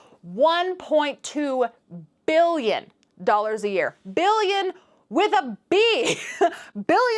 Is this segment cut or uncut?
uncut